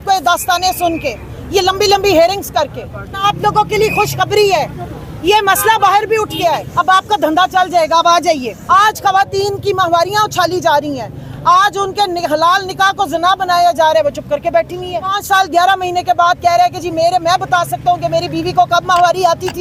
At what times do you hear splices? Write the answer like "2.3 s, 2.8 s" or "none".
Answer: 3.2 s, 6.7 s, 8.5 s, 15.2 s